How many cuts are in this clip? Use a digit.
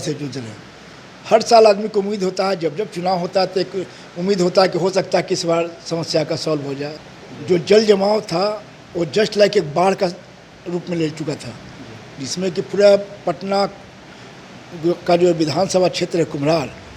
1